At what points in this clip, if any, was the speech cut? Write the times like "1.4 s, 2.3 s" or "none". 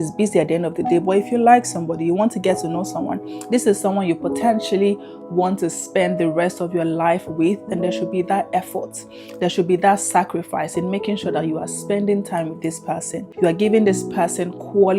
13.3 s